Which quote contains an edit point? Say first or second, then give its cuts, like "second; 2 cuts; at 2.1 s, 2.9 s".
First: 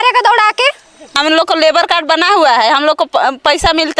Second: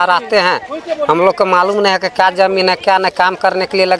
first; 1 cut; at 1.2 s